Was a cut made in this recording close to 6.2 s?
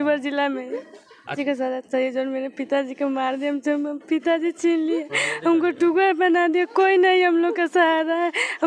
no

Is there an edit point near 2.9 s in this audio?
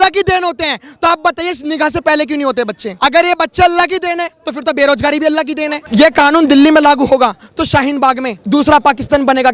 yes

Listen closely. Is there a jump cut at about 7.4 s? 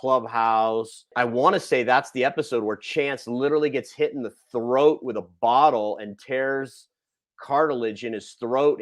no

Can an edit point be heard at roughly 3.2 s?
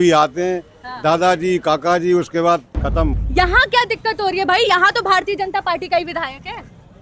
yes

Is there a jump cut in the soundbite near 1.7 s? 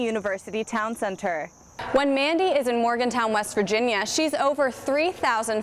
yes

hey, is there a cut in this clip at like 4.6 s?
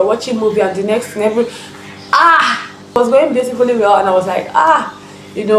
no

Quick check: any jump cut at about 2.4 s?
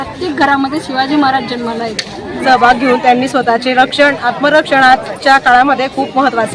yes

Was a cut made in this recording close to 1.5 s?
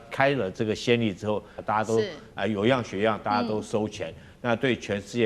yes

